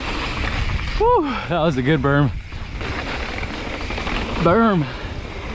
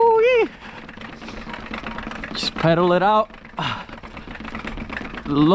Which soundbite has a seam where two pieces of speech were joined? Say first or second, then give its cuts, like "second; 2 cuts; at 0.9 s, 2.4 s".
first; 1 cut; at 2.8 s